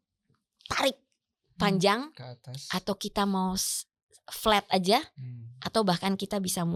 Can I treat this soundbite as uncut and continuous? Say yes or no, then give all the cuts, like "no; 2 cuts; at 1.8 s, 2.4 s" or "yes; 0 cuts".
yes; 0 cuts